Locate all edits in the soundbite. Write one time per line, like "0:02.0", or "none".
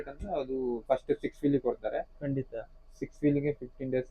none